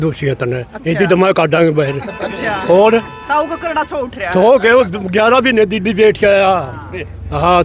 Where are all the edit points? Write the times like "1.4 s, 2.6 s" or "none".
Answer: none